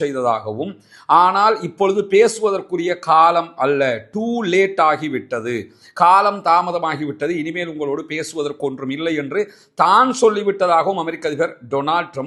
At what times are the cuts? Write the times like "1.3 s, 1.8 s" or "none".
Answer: none